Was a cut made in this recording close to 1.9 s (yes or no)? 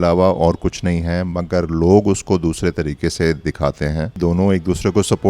no